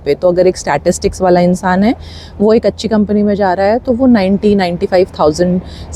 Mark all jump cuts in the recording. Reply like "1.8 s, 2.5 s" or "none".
none